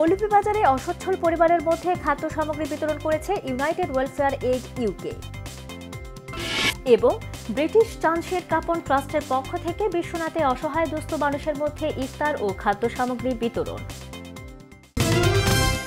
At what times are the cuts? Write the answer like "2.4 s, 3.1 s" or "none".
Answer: 14.9 s